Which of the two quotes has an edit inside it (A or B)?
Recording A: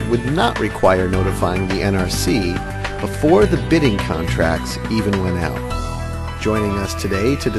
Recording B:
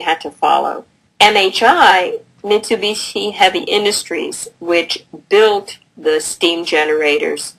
A